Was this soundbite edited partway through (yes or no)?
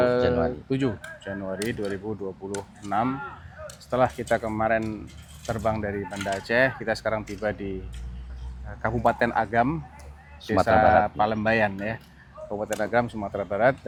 no